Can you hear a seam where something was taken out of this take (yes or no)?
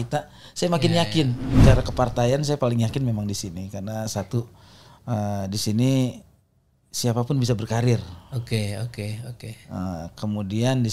yes